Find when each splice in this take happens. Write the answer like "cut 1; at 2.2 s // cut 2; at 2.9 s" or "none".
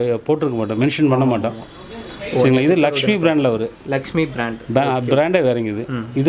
none